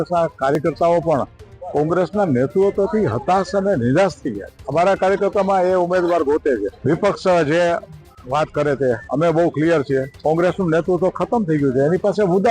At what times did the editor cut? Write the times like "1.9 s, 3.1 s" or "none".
4.5 s, 6.7 s, 10.1 s